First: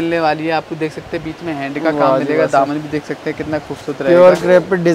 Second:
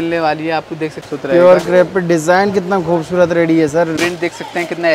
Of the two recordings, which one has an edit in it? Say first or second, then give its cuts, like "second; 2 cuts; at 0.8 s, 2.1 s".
second; 2 cuts; at 1.0 s, 3.9 s